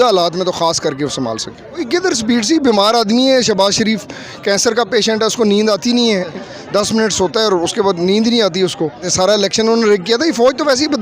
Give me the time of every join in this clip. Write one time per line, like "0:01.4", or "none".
0:01.8
0:06.4
0:09.0